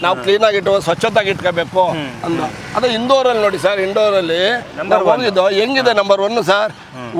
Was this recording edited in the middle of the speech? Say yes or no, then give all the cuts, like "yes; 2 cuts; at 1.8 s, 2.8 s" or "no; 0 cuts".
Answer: no; 0 cuts